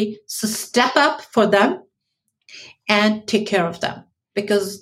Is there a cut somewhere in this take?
no; 0 cuts

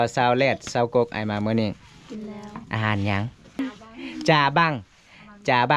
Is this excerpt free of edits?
no; 1 cut; at 3.6 s

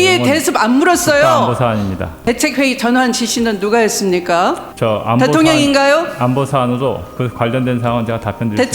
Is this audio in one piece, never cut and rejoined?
no; 2 cuts; at 2.2 s, 4.7 s

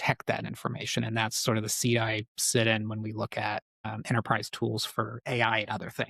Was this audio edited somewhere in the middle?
no; 0 cuts

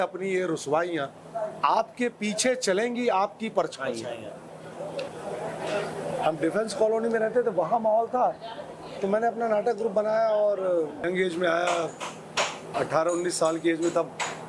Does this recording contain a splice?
yes; 2 cuts; at 5.1 s, 11.1 s

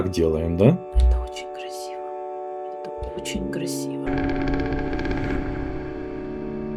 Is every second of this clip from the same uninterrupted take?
no; 1 cut; at 4.1 s

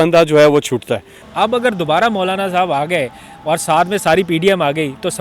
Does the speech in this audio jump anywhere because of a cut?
yes; 1 cut; at 1.1 s

